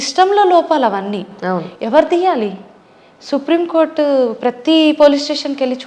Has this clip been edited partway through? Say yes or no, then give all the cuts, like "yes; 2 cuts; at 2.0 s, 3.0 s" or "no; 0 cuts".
no; 0 cuts